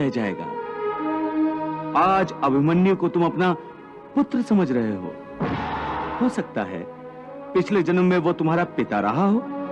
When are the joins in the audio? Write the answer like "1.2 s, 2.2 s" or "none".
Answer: 6.1 s